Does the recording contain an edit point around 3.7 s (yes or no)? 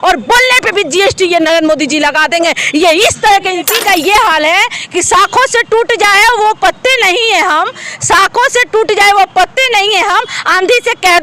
yes